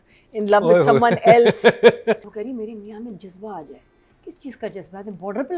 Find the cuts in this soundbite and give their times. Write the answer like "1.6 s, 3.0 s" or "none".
2.2 s